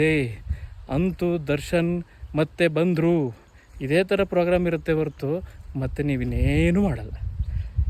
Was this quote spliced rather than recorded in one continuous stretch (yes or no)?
no